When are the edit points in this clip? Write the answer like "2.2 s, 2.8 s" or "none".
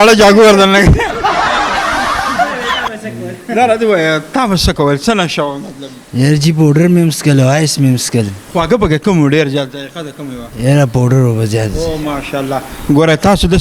none